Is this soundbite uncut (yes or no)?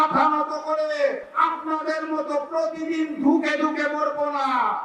no